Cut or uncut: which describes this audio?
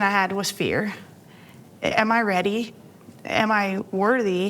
cut